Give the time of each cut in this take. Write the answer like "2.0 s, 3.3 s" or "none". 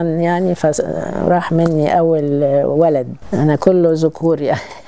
none

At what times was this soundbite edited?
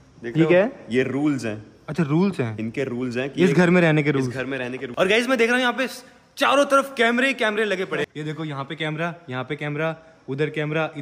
4.8 s, 8.1 s

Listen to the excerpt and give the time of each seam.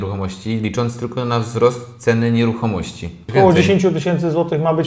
3.2 s

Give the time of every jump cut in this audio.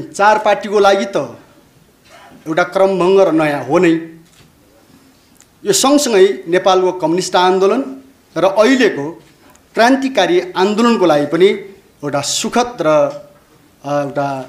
none

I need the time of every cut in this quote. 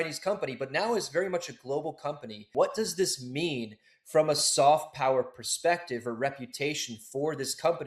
2.5 s

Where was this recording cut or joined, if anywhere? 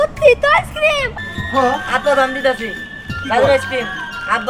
1.1 s

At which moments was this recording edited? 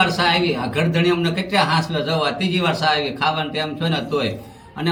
none

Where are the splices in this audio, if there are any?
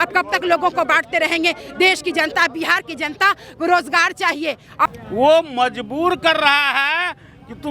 4.8 s

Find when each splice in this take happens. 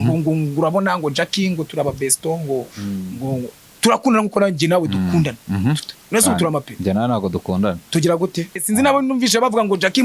3.6 s, 8.6 s

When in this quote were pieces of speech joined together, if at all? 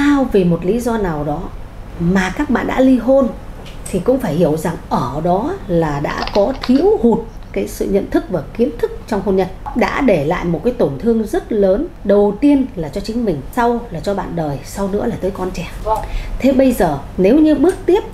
9.6 s, 11.9 s, 13.4 s, 15.7 s, 17.0 s

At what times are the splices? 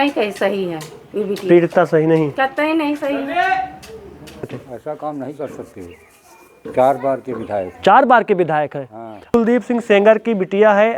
4.7 s, 9.3 s

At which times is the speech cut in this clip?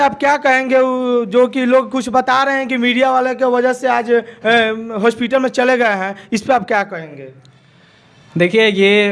none

